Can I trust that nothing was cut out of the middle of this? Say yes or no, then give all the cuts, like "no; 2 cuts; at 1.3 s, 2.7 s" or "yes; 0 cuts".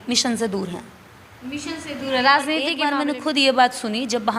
no; 1 cut; at 2.8 s